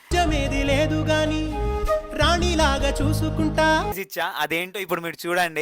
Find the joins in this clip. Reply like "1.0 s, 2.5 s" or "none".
3.9 s